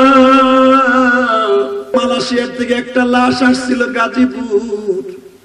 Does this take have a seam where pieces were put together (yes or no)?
yes